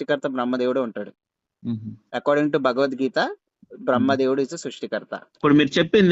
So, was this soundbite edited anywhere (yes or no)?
yes